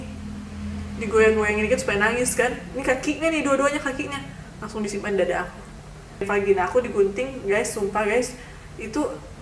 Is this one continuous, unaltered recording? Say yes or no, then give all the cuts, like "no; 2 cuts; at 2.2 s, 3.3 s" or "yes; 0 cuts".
no; 1 cut; at 6.3 s